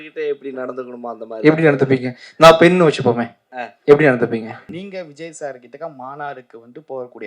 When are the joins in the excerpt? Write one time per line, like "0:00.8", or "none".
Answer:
0:04.7